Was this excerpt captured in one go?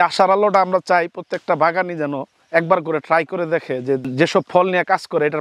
yes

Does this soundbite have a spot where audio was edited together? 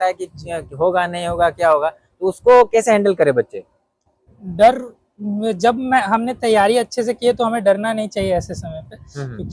no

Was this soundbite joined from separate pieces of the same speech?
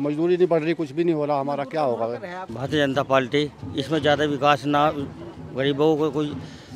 yes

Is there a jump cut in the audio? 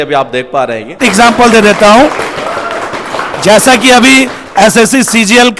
yes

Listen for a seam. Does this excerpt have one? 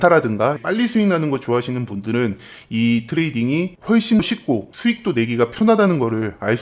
no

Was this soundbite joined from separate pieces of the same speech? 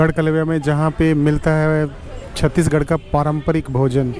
no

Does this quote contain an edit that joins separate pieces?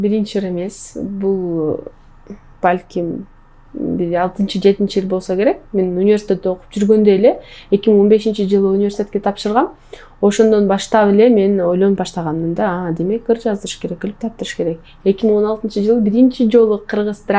no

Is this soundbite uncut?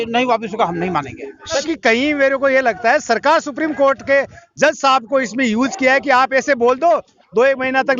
no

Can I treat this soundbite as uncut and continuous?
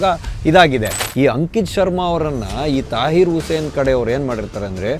no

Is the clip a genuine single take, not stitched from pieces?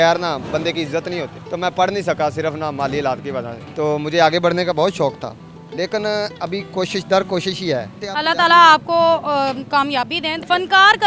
yes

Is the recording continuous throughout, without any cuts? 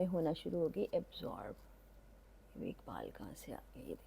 yes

